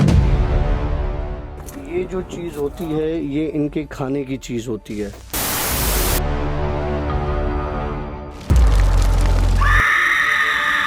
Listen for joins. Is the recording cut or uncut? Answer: uncut